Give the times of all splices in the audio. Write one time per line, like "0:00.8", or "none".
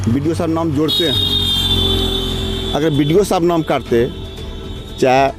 none